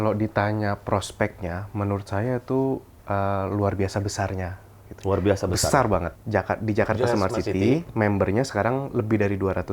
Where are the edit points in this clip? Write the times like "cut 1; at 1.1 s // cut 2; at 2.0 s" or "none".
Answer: cut 1; at 6.2 s